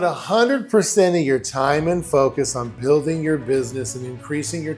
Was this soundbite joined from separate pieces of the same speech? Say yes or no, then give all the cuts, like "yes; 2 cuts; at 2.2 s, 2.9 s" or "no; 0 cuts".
no; 0 cuts